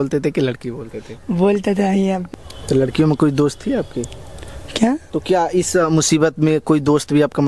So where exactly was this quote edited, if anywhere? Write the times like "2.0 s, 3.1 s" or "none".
2.2 s, 5.1 s